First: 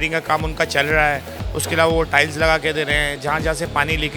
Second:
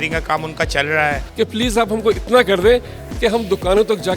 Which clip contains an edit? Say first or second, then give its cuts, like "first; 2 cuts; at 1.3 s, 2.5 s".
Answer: second; 1 cut; at 1.2 s